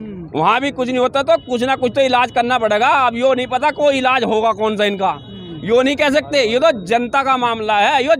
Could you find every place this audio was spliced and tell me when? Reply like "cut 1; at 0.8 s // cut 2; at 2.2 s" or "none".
none